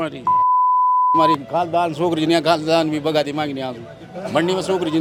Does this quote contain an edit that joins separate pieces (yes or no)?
no